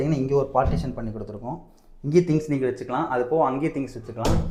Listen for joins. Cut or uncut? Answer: uncut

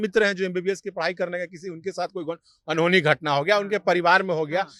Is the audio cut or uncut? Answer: uncut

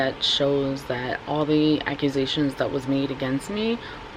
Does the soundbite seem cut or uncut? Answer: uncut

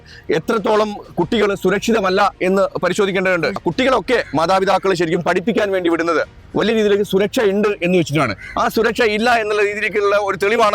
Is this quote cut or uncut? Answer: cut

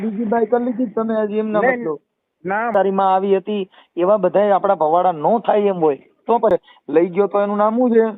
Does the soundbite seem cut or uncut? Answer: cut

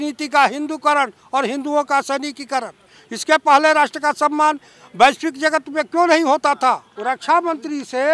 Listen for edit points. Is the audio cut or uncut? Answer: cut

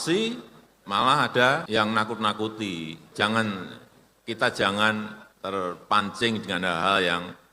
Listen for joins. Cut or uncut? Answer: cut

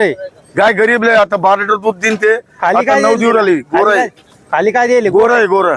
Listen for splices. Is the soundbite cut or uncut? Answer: uncut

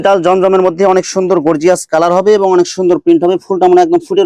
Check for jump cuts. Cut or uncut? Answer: uncut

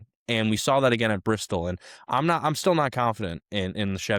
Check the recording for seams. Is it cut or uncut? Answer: uncut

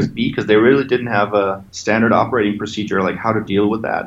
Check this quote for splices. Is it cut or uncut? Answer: cut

